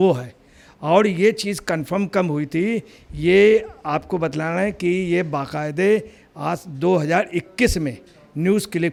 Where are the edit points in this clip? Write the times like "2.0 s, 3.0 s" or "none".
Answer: none